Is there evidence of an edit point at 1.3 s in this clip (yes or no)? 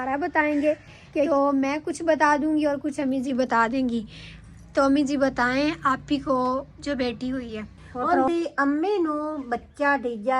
yes